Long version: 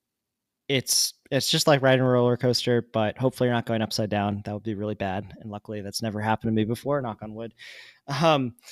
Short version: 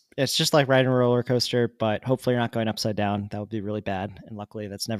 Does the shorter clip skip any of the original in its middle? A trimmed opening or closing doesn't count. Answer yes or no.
no